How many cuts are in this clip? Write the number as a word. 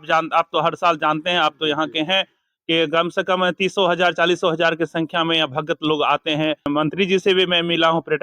one